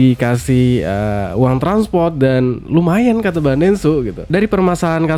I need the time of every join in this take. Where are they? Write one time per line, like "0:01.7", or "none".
0:04.2